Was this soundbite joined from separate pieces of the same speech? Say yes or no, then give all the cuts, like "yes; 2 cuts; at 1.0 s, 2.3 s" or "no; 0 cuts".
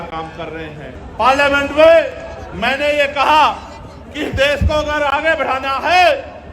yes; 1 cut; at 1.0 s